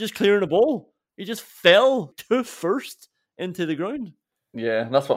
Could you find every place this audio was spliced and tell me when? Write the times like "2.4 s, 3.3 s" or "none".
2.2 s

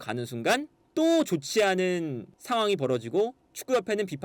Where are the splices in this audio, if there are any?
none

